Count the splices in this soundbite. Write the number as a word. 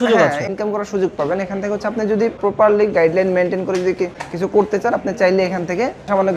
zero